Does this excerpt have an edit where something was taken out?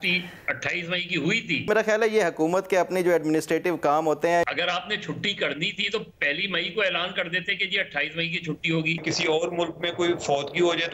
yes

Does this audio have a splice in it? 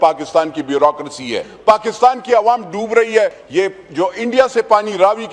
yes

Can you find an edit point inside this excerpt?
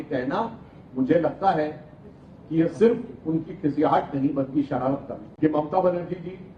yes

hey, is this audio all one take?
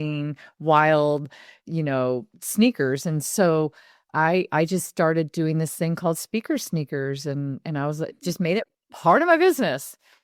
yes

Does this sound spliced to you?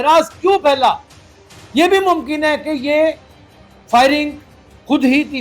no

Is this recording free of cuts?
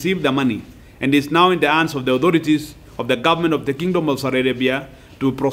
yes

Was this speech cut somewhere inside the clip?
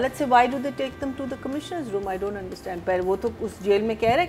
no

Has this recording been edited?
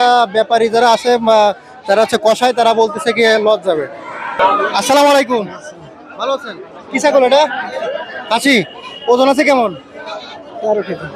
no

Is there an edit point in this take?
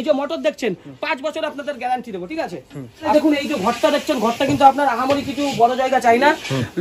yes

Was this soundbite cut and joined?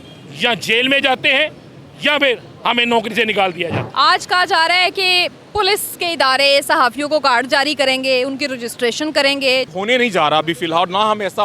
yes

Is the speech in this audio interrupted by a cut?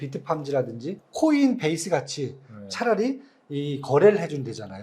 yes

